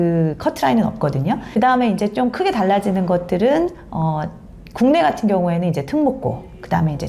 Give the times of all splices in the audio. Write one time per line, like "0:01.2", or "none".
0:01.4